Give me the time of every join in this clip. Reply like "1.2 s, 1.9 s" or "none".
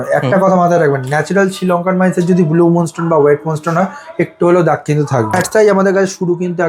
5.4 s